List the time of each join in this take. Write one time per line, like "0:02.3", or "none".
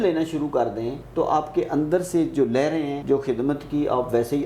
0:01.0
0:03.0